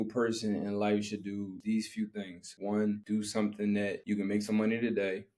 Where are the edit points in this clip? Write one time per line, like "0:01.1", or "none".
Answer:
0:01.6
0:02.4
0:03.0
0:04.0

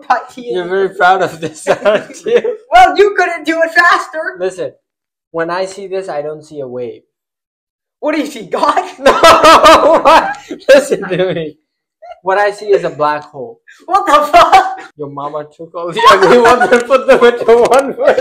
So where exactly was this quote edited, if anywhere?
none

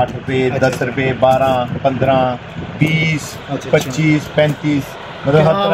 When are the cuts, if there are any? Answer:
none

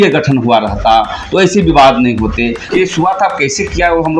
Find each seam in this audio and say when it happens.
0:02.7

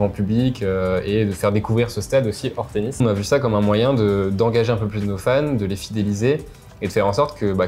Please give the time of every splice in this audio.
0:03.0

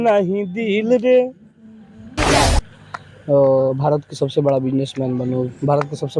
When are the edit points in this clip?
0:02.3

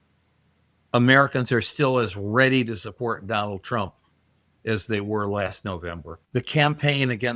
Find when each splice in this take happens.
0:06.1

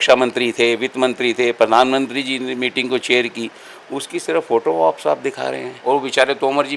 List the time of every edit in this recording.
0:05.7

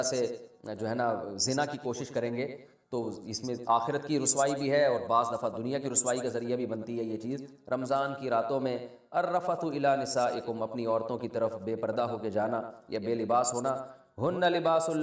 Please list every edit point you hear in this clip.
0:07.5

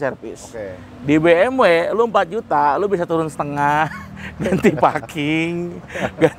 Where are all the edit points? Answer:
none

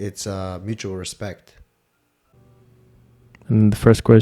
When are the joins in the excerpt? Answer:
0:02.3

